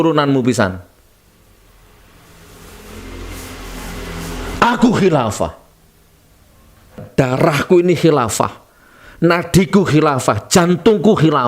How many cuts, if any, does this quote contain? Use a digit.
1